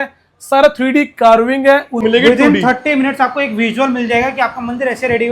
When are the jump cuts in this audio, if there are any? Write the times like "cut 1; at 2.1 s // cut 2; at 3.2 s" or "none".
cut 1; at 2.0 s